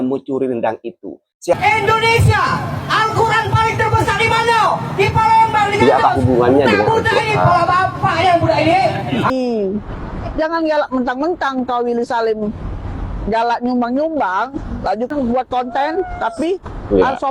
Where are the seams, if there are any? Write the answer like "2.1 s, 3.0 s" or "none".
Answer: 1.5 s, 9.3 s, 15.1 s